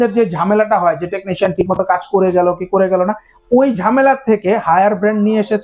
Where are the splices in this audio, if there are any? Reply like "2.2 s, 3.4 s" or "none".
none